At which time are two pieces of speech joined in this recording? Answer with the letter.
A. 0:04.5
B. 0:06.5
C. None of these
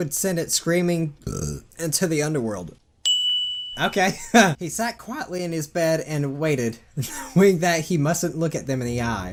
C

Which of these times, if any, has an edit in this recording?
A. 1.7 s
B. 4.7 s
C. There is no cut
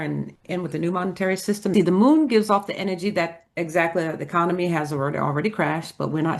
A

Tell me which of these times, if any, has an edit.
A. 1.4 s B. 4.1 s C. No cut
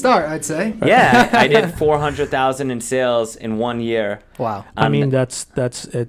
C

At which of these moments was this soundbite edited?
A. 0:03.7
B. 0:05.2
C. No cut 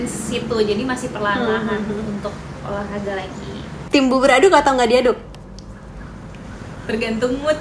A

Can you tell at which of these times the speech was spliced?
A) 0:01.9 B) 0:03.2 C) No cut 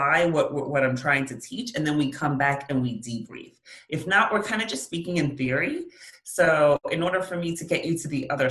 C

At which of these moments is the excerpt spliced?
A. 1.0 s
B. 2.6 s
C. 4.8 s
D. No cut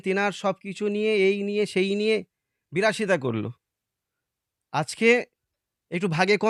D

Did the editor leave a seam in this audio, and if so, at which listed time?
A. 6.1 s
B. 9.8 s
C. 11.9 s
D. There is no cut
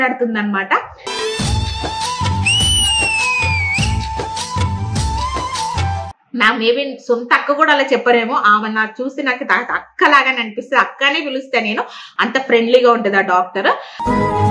A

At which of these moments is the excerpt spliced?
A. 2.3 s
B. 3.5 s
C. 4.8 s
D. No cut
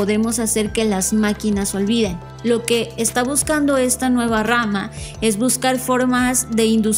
A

